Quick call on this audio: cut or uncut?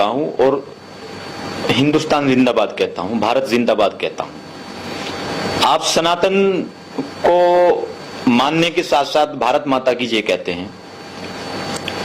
uncut